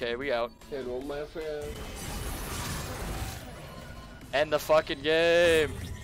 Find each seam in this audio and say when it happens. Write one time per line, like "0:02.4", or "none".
none